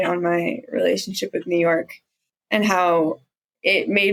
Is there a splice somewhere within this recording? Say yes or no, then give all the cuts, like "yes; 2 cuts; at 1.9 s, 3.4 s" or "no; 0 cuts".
no; 0 cuts